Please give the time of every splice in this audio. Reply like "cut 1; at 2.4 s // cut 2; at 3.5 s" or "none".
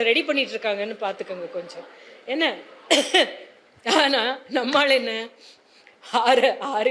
none